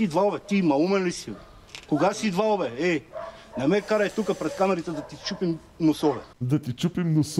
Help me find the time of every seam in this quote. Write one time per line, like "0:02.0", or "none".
0:06.4